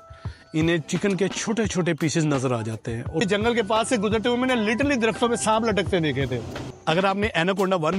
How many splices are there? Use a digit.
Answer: 2